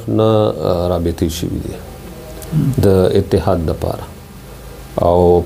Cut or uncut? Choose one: uncut